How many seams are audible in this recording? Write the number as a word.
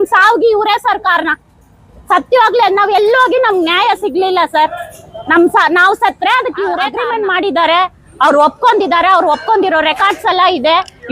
one